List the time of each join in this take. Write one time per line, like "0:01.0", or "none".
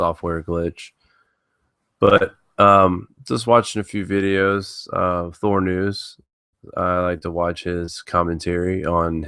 0:07.7